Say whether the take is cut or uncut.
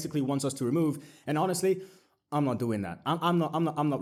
uncut